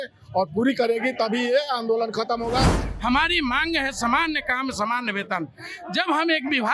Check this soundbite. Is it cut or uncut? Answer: cut